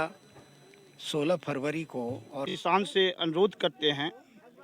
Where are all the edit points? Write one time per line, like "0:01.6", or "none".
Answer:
0:02.5